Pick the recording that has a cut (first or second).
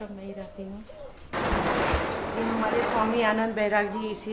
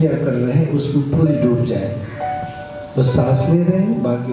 first